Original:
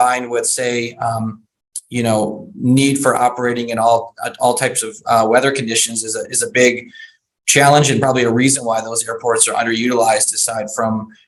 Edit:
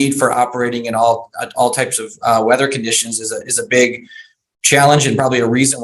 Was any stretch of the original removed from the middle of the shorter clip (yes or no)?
no